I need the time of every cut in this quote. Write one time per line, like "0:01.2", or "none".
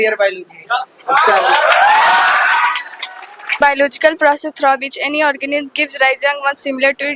0:03.6